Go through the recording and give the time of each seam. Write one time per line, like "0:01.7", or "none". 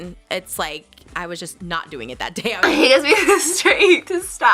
0:02.6